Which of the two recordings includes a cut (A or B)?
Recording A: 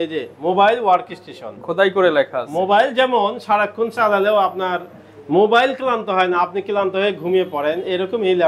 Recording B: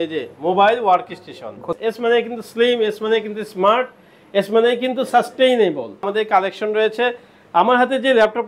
B